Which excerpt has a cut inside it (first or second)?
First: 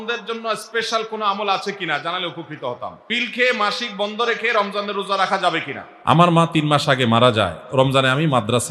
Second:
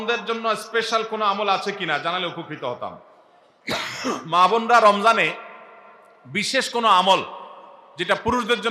first